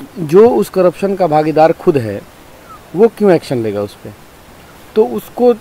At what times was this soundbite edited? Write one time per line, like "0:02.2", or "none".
none